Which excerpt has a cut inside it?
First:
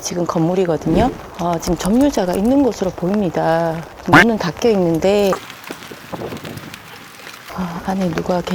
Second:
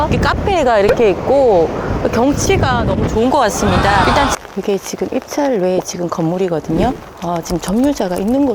second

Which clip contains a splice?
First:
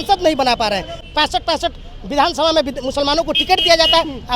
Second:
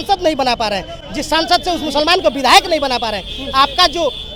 first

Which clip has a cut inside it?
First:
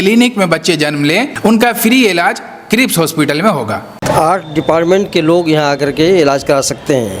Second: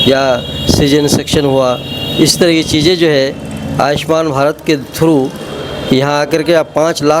first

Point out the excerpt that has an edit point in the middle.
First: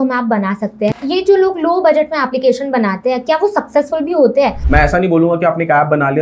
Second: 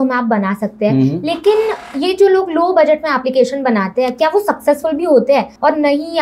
first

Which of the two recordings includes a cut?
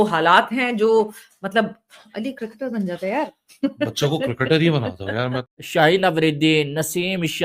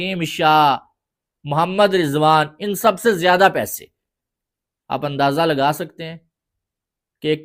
first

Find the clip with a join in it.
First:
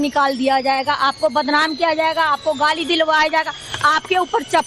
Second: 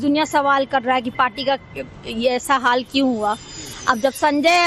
second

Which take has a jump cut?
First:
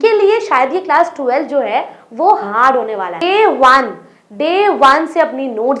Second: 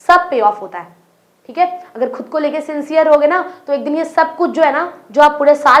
first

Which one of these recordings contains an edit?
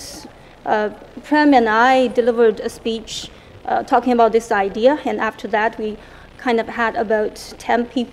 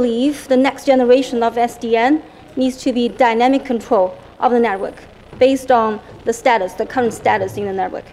first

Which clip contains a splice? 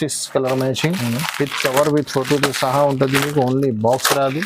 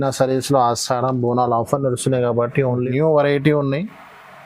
second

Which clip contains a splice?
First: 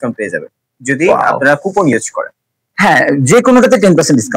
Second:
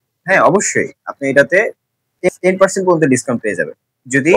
second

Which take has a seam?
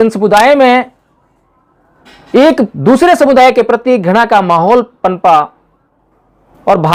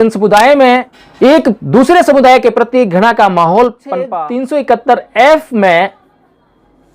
second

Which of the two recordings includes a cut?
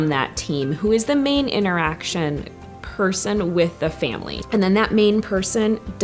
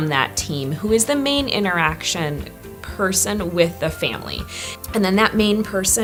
first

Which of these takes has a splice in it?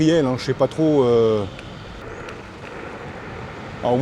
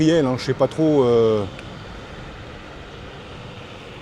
first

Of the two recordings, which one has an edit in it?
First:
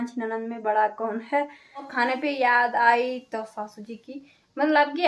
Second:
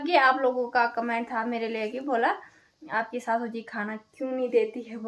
first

